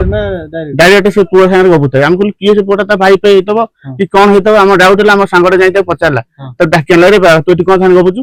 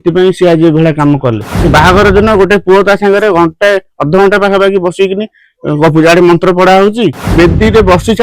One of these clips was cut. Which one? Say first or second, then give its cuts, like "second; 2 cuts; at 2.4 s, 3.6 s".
second; 2 cuts; at 1.5 s, 7.3 s